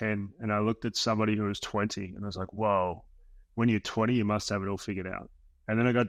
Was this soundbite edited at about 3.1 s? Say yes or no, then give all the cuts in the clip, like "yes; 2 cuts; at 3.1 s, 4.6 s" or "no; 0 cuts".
no; 0 cuts